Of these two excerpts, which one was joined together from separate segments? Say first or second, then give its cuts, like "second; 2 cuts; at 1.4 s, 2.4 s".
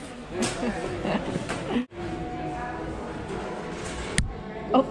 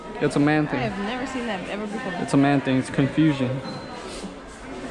first; 1 cut; at 1.8 s